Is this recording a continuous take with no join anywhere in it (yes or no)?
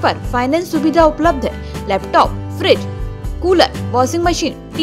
yes